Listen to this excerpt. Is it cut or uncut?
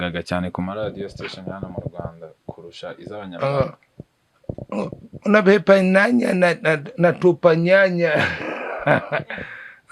uncut